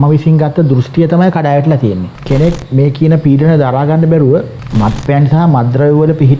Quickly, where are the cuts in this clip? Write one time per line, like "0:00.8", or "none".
0:02.1
0:04.6